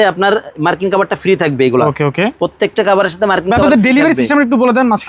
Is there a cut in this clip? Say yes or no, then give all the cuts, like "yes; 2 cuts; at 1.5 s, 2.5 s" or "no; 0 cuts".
no; 0 cuts